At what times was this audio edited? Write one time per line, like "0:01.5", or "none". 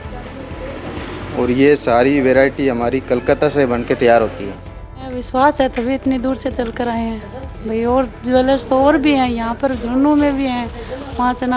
0:05.1